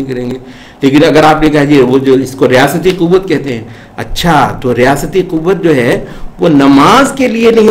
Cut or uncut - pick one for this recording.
uncut